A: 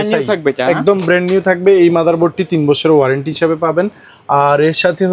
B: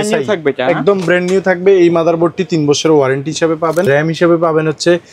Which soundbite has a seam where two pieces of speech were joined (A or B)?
B